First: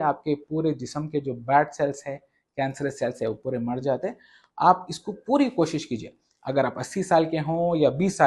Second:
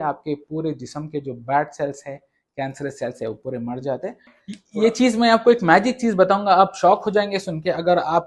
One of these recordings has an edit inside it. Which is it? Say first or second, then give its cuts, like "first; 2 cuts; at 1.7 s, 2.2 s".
second; 1 cut; at 4.4 s